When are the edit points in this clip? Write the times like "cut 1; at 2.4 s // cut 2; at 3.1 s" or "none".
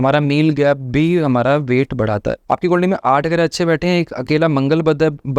cut 1; at 2.4 s